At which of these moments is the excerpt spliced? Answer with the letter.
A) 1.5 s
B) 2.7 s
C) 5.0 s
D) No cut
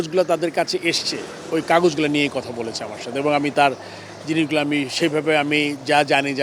D